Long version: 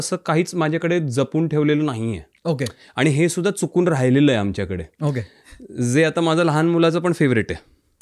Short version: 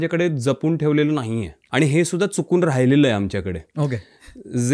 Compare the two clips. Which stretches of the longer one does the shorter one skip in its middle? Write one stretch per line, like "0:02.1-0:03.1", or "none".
0:02.3-0:02.8